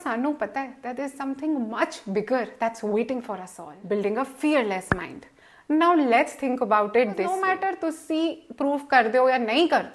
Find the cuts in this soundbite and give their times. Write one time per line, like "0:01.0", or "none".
0:07.6